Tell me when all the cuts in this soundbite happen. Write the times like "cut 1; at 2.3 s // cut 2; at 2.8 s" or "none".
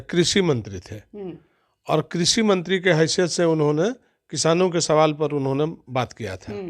none